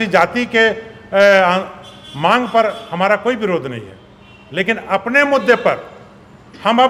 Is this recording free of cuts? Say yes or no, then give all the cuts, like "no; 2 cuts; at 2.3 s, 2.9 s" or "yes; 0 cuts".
yes; 0 cuts